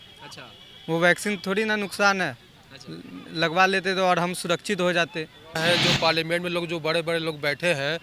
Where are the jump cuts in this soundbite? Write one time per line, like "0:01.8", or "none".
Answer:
0:05.6